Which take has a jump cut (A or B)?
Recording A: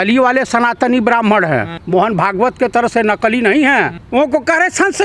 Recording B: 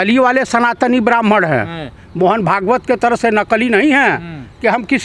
A